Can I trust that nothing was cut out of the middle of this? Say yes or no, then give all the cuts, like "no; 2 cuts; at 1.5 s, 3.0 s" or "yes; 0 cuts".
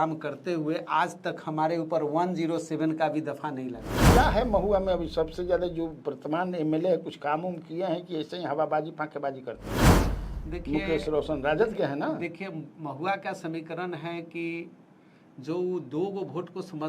no; 1 cut; at 4.1 s